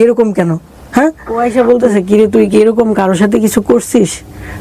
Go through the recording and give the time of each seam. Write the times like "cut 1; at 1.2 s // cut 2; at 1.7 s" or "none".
cut 1; at 1.4 s